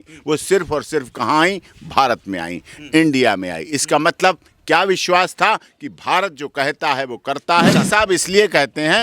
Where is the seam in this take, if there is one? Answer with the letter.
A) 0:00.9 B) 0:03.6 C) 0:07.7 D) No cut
C